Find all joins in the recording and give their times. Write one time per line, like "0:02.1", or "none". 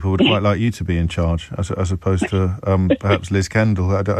none